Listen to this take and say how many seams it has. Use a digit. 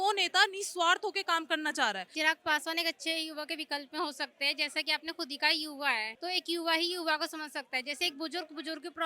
2